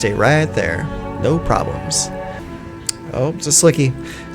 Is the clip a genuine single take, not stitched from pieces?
no; 1 cut; at 2.4 s

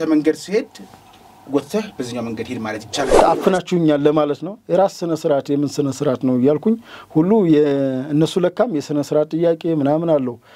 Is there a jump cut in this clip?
yes; 1 cut; at 3.2 s

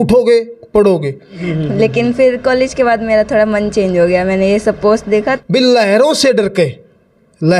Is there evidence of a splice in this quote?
yes; 2 cuts; at 1.5 s, 5.3 s

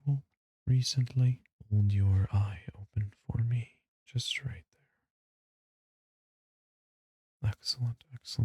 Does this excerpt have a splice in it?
yes; 1 cut; at 1.5 s

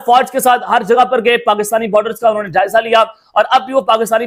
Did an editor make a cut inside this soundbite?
no; 0 cuts

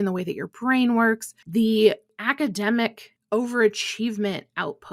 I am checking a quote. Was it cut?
yes; 3 cuts; at 1.4 s, 2.1 s, 3.1 s

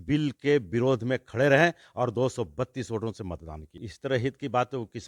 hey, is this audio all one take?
no; 1 cut; at 3.9 s

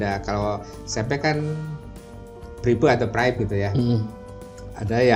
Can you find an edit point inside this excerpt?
no; 0 cuts

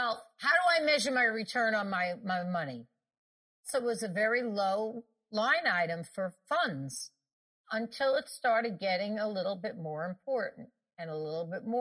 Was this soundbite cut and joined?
yes; 4 cuts; at 3.7 s, 5.3 s, 6.4 s, 7.6 s

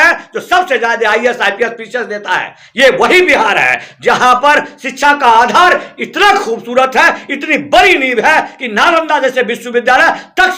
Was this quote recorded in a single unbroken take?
yes; 0 cuts

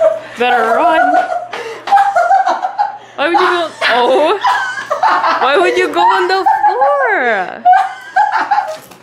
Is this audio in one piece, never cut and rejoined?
yes; 0 cuts

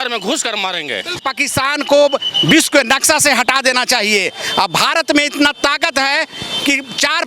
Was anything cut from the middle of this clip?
yes; 1 cut; at 1.2 s

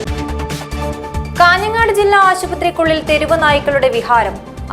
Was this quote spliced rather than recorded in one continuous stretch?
no; 0 cuts

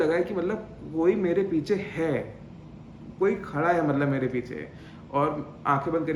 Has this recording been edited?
no; 0 cuts

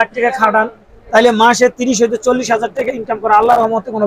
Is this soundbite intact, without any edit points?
yes; 0 cuts

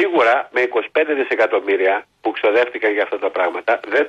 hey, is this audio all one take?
no; 1 cut; at 2.1 s

